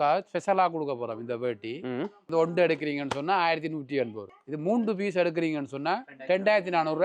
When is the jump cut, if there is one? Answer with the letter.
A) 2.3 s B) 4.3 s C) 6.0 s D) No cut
A